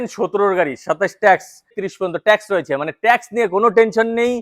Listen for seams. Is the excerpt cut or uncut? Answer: cut